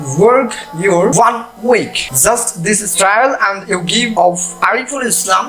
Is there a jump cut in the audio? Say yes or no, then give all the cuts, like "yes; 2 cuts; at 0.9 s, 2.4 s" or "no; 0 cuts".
yes; 3 cuts; at 1.1 s, 2.0 s, 4.1 s